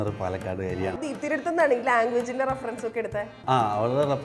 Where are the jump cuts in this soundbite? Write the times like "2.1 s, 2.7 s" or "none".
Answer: 1.0 s, 3.4 s